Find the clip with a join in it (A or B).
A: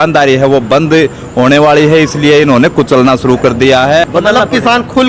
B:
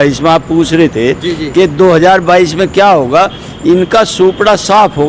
A